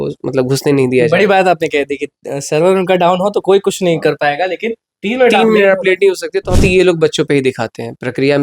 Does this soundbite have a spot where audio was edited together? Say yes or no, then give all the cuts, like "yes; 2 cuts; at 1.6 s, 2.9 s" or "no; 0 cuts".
yes; 1 cut; at 6.6 s